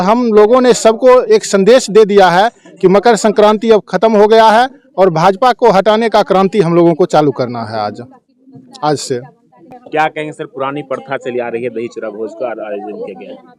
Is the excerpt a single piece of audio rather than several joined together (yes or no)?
yes